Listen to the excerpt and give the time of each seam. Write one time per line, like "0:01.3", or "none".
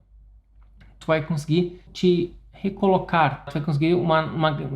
0:01.9
0:03.5

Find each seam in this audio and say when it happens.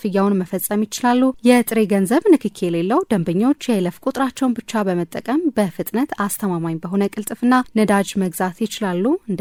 none

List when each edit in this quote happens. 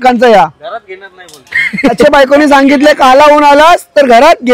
0:02.0

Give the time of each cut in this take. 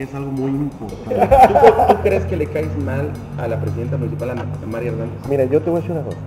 0:01.0

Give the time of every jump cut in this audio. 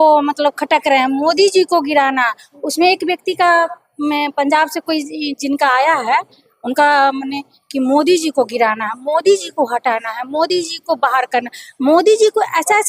none

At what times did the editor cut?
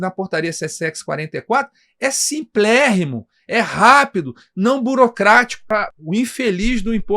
0:05.7

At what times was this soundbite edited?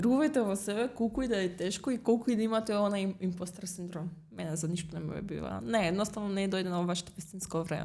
none

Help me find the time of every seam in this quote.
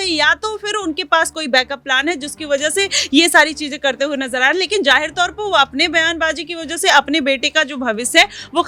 none

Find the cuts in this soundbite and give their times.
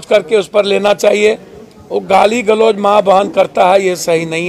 none

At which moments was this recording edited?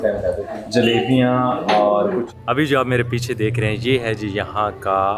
0:02.3

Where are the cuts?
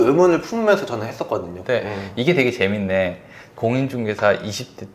none

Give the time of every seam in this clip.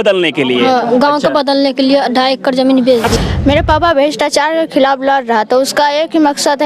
0:03.1

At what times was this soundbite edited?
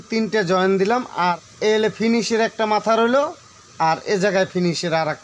0:01.5

